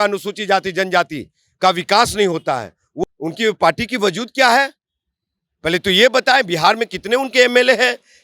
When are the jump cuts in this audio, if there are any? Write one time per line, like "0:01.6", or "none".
0:02.8